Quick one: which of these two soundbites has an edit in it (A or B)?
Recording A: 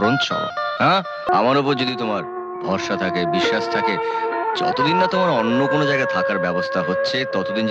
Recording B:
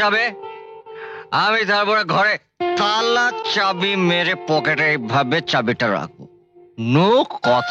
A